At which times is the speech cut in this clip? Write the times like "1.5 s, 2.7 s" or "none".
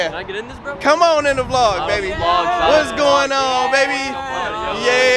none